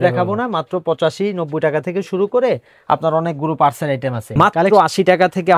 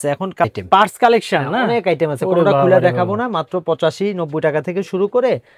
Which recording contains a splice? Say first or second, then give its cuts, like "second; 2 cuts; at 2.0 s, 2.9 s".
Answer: first; 1 cut; at 4.3 s